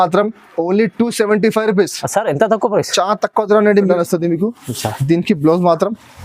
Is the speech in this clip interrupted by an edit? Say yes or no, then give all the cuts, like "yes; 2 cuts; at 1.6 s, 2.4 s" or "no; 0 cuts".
yes; 1 cut; at 3.9 s